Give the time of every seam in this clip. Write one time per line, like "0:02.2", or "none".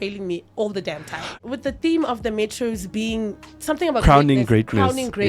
0:01.4